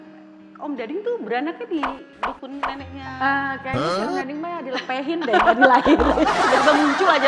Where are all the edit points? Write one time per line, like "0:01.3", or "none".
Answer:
none